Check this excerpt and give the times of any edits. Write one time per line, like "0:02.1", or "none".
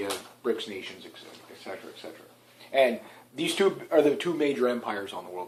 none